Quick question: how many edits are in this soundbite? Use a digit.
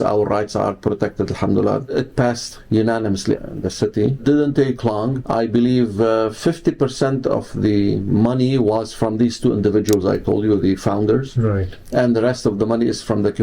0